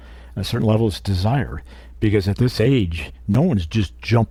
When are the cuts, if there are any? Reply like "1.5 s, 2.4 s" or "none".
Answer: none